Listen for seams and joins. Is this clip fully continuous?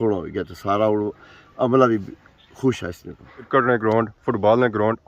no; 1 cut; at 3.5 s

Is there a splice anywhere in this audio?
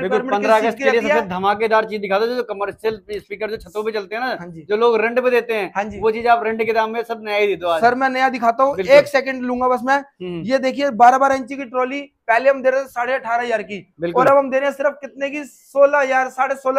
no; 0 cuts

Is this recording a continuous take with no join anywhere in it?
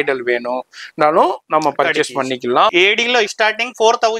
no; 1 cut; at 2.7 s

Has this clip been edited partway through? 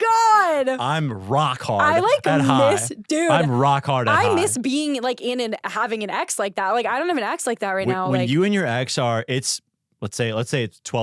no; 0 cuts

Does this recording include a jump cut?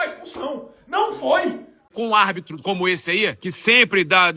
yes; 2 cuts; at 1.8 s, 3.5 s

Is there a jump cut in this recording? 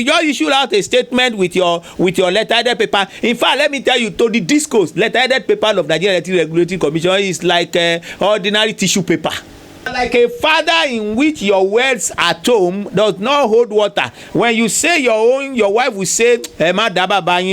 yes; 1 cut; at 9.9 s

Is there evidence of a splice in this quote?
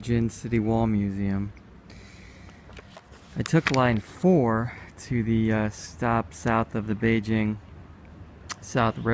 no; 0 cuts

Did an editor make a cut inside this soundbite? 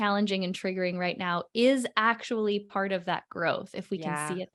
no; 0 cuts

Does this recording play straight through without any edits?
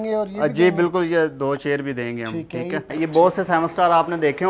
no; 1 cut; at 2.9 s

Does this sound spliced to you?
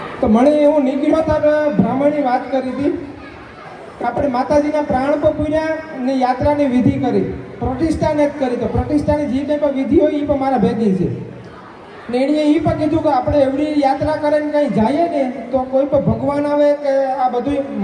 no; 0 cuts

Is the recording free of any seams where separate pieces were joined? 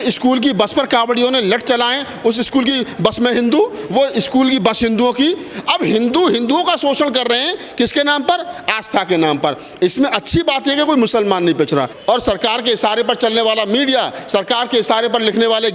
no; 1 cut; at 11.9 s

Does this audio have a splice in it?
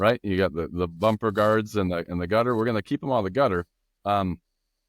no; 0 cuts

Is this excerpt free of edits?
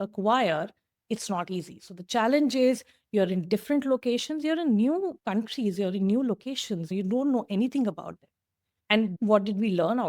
no; 1 cut; at 9.0 s

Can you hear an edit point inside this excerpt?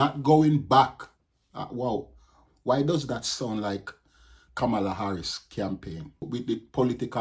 yes; 1 cut; at 6.3 s

